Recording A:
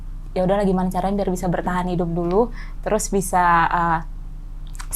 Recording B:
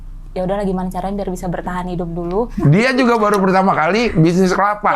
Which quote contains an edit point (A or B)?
B